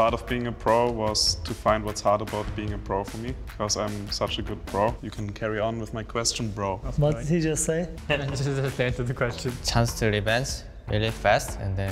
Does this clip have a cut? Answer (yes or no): yes